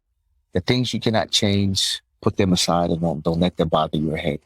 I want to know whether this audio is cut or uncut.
uncut